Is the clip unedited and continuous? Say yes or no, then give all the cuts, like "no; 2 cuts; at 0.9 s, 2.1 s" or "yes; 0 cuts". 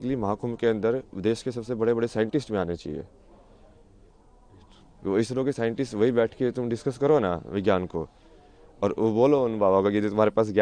yes; 0 cuts